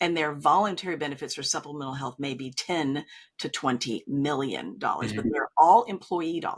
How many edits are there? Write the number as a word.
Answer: zero